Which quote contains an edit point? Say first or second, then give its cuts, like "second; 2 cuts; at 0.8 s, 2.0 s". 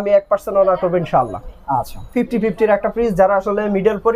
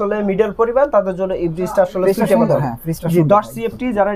first; 1 cut; at 2.0 s